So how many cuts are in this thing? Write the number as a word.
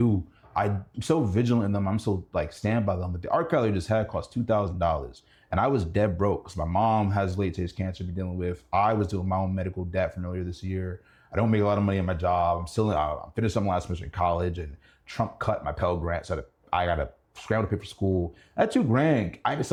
zero